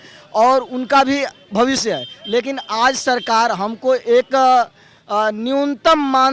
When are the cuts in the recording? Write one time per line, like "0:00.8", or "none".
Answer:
none